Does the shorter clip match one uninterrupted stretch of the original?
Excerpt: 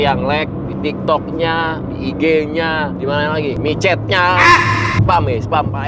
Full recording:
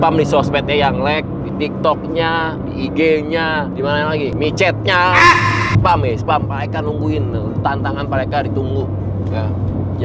yes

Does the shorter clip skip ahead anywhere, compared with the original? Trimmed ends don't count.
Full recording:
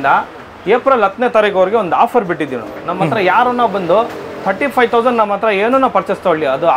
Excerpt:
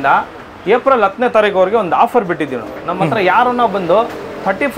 no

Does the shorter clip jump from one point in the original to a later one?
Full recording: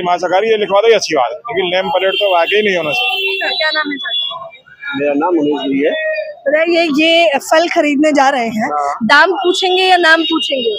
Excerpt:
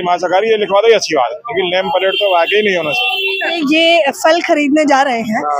yes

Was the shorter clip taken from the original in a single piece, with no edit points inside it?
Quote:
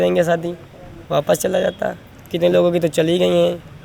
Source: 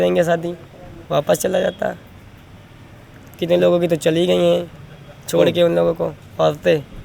no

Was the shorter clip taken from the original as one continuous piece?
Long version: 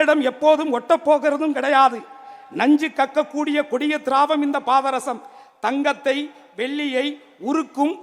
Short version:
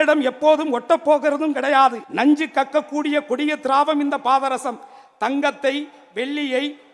no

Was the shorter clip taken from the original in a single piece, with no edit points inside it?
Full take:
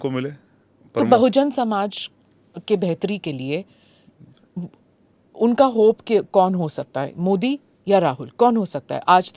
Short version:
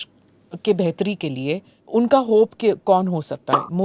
no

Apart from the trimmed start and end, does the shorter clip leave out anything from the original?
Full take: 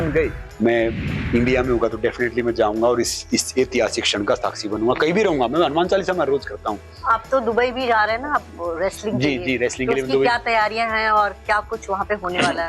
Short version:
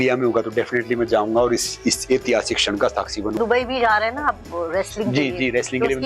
yes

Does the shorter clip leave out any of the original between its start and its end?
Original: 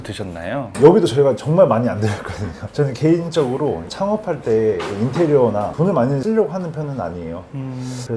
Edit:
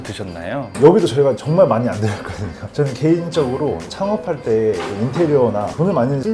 no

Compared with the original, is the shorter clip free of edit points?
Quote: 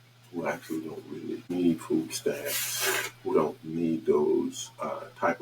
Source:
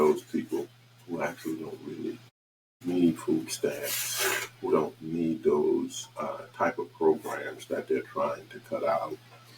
no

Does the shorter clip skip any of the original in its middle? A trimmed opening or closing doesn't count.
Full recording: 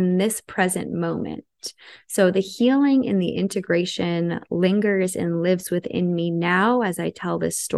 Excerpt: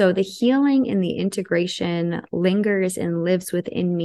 no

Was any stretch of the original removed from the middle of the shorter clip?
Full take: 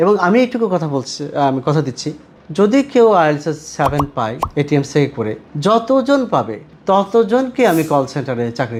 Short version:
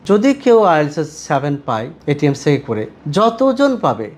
no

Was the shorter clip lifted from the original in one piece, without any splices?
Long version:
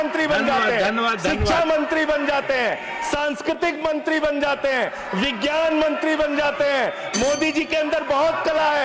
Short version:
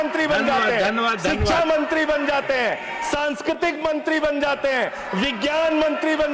yes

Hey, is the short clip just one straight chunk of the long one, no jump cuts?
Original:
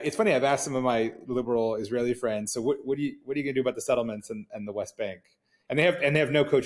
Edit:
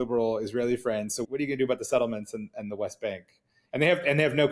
no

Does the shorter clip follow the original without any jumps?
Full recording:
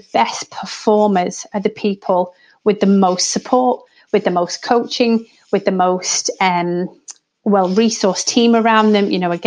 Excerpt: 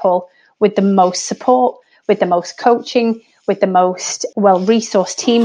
no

